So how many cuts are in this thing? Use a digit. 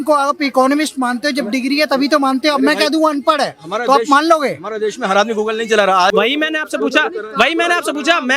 1